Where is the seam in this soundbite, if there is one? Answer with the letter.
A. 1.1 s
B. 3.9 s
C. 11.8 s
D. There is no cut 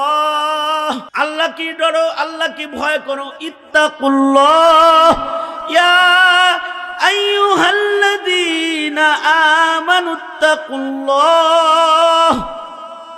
A